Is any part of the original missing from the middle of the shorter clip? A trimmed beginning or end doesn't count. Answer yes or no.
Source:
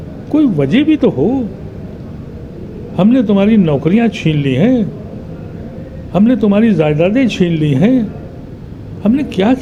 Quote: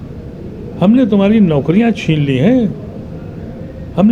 no